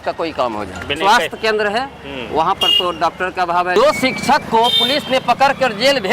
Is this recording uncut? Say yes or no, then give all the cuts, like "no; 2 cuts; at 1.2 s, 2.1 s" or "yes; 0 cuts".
no; 2 cuts; at 1.0 s, 3.8 s